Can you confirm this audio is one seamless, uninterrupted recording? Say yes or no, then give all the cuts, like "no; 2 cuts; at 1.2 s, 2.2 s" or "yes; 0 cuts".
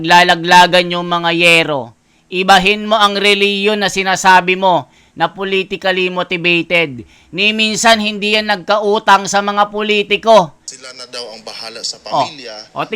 no; 1 cut; at 10.6 s